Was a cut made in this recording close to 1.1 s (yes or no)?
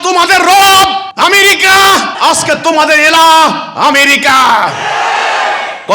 yes